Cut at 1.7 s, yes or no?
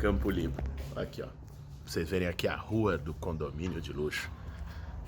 yes